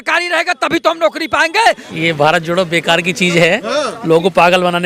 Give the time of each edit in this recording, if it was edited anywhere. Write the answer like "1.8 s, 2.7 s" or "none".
1.9 s